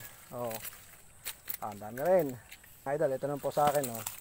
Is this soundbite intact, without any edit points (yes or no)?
no